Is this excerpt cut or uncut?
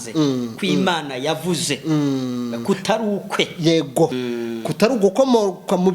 cut